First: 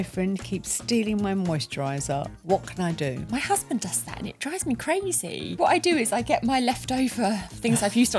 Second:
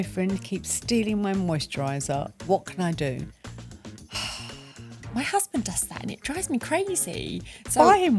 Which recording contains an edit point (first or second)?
first